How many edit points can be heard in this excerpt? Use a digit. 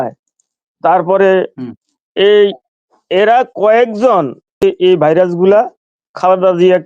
1